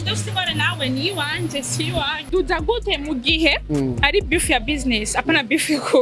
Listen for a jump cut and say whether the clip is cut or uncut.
cut